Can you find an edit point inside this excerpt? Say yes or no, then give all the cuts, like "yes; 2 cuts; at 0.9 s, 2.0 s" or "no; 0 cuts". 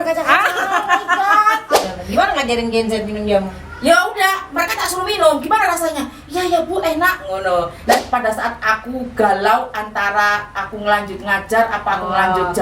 yes; 2 cuts; at 1.9 s, 8.0 s